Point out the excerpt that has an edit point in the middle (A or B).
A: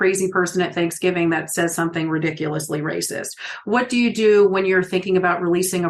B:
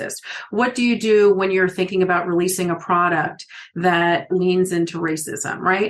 B